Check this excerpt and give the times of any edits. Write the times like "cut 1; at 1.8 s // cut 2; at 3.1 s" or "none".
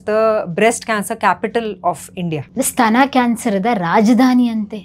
cut 1; at 2.5 s